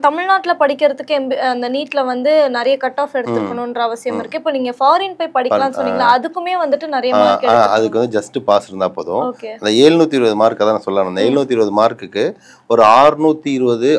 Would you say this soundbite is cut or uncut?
uncut